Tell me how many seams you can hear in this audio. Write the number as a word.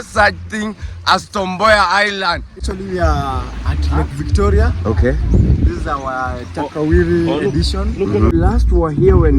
two